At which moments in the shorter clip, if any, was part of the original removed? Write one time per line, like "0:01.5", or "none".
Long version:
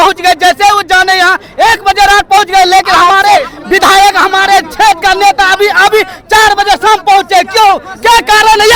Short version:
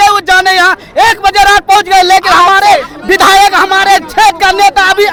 none